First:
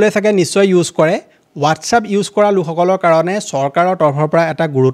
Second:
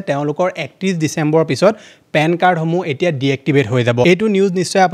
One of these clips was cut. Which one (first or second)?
second